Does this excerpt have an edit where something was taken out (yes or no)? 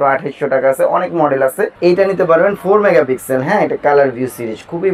yes